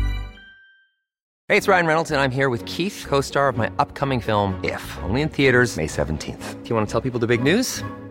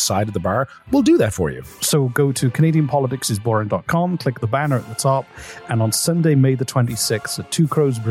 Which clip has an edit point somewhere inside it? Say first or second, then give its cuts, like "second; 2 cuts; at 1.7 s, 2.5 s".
first; 1 cut; at 1.3 s